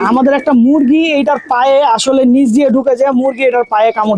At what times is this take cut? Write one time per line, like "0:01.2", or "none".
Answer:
none